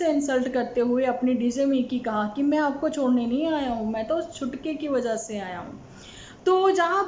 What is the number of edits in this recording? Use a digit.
0